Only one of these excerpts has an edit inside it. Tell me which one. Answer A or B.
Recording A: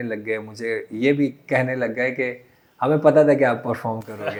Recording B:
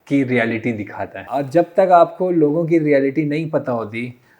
B